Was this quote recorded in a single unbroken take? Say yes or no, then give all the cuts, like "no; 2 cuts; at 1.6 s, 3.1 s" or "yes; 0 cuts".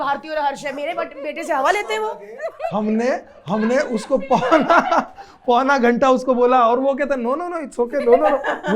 yes; 0 cuts